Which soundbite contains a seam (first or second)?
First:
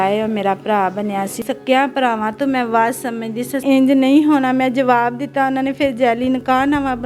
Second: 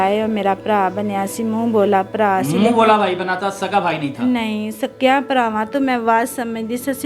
first